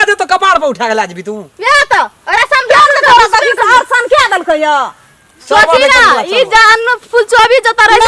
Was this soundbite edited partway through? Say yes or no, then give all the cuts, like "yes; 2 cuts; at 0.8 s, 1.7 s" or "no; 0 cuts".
no; 0 cuts